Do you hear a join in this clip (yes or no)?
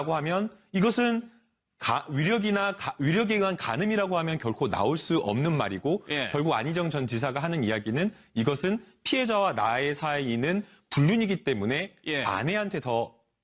yes